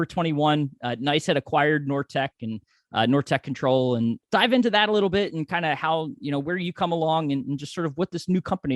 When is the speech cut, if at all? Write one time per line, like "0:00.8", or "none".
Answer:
0:04.2